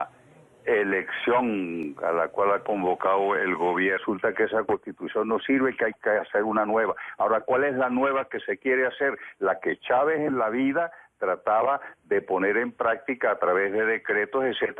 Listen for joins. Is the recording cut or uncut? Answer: uncut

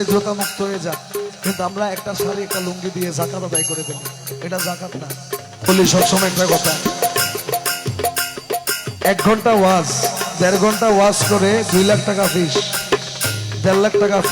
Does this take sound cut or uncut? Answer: cut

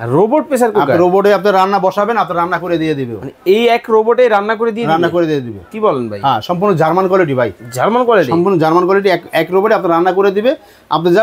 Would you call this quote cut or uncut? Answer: uncut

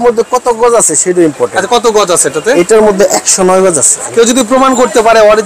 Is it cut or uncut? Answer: cut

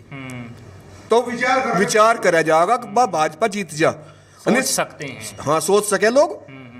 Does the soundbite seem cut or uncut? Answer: uncut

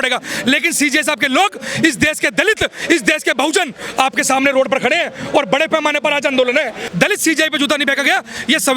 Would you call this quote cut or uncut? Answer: cut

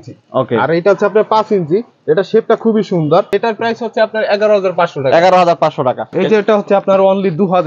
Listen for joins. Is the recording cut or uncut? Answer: cut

